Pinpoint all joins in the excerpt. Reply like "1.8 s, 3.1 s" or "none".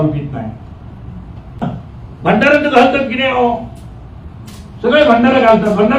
1.6 s